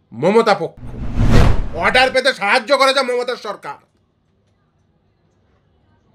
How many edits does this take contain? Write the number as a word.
one